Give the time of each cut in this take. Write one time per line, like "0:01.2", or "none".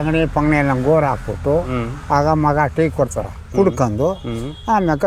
none